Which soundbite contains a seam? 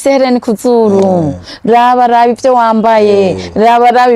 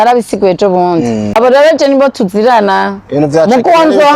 second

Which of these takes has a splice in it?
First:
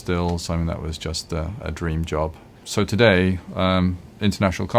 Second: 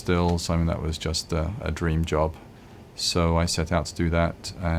first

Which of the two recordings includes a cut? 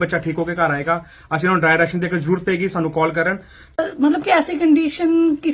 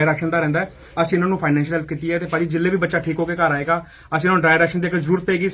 first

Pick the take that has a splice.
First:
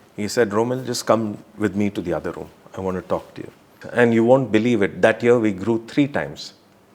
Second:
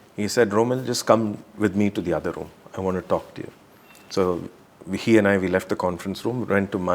first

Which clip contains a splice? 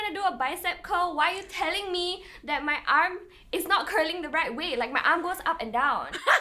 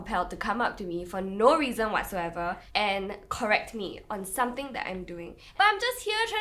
second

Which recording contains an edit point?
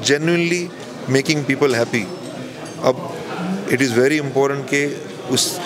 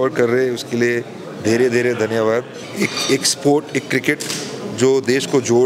second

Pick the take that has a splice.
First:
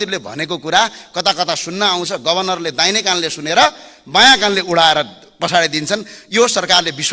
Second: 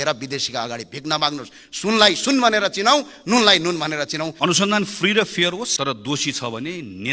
second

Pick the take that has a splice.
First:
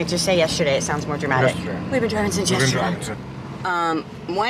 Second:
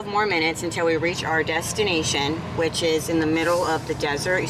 first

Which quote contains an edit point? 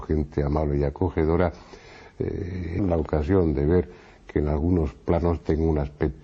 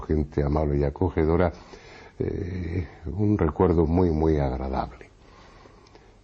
second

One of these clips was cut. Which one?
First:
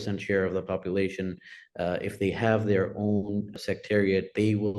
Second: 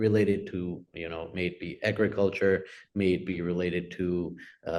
first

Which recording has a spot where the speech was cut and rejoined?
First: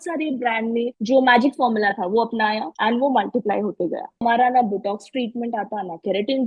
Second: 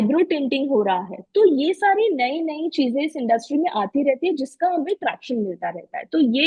first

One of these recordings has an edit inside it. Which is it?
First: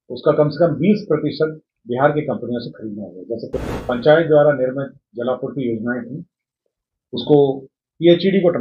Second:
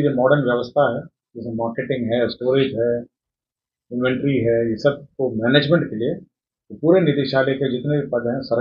first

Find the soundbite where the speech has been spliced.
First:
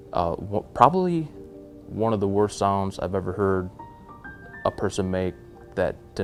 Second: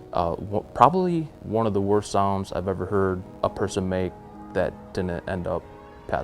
second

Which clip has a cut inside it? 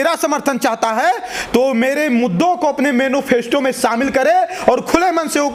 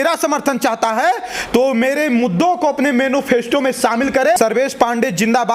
second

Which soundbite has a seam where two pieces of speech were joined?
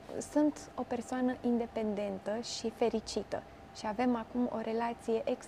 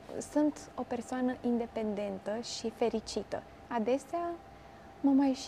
second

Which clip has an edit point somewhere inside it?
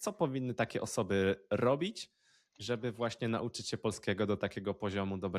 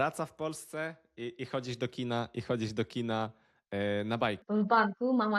second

